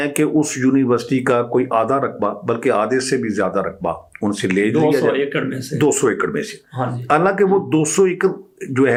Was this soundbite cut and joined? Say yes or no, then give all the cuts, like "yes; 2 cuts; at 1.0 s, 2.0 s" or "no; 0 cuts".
no; 0 cuts